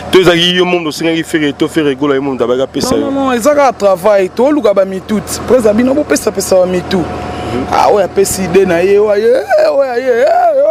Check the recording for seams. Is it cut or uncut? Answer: uncut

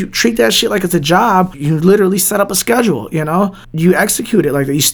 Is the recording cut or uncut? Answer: cut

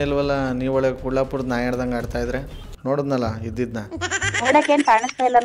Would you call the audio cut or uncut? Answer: cut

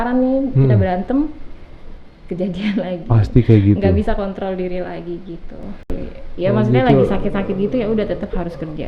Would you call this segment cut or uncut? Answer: cut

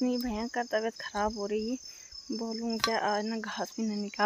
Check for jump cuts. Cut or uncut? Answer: uncut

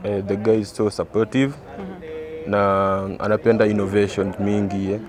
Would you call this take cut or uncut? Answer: uncut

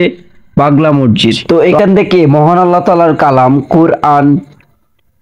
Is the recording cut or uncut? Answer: cut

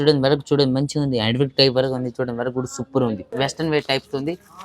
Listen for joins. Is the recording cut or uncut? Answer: cut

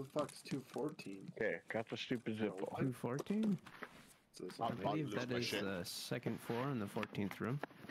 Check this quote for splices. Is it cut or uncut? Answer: uncut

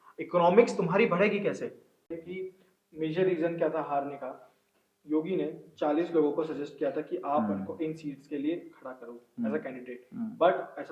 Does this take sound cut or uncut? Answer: cut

